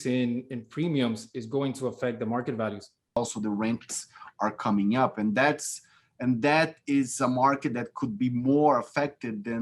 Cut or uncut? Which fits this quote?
cut